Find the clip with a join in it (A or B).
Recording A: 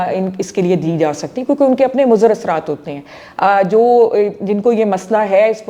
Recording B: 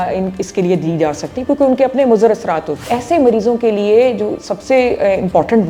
B